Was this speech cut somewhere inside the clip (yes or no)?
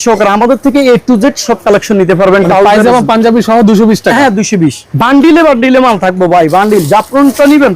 yes